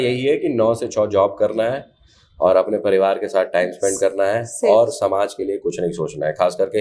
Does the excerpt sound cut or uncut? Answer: uncut